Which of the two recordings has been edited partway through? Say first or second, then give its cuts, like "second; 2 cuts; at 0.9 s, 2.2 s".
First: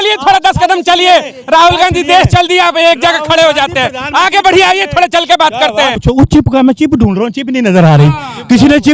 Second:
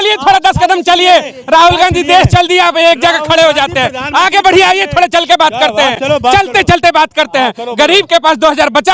first; 1 cut; at 6.0 s